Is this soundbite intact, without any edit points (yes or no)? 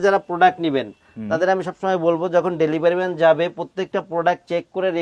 yes